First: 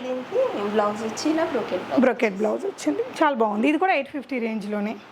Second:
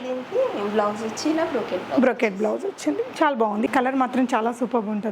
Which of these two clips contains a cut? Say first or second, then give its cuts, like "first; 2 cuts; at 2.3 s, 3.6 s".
second; 1 cut; at 3.7 s